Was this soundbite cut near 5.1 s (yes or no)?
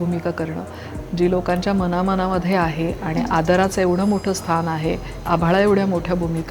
yes